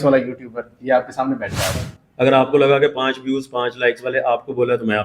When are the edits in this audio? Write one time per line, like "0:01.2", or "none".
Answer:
0:01.9